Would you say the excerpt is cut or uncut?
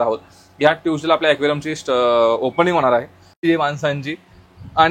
cut